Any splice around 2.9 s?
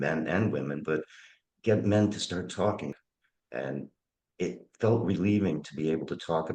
yes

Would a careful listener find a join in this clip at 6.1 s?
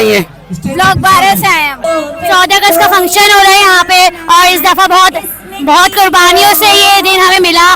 no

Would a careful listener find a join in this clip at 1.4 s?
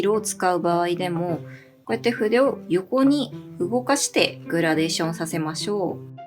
no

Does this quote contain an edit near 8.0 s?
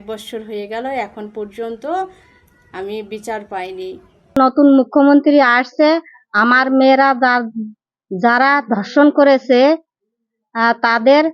no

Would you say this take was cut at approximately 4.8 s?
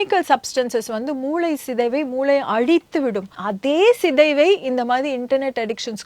no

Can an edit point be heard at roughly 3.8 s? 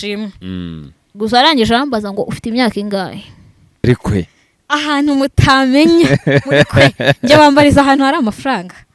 yes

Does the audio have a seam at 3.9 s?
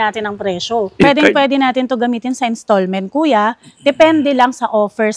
no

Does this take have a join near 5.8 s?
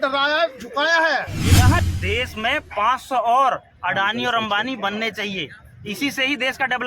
no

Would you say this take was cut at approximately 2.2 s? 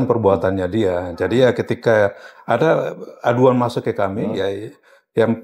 no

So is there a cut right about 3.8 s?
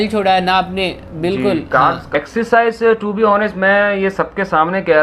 no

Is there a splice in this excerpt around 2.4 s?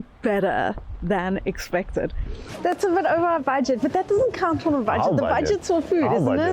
yes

